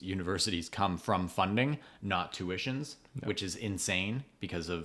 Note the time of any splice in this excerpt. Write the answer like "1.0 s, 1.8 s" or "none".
none